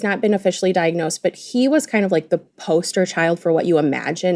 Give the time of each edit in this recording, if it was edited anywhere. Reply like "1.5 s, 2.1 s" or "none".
none